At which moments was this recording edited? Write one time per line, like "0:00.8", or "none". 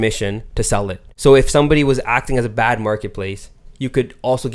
0:01.1